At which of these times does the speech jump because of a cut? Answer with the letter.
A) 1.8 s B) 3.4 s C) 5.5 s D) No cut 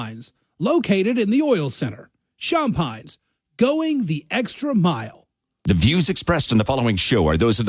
C